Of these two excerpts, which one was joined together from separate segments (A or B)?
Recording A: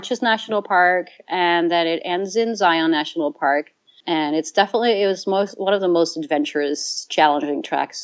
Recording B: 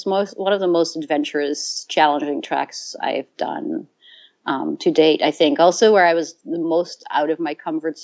A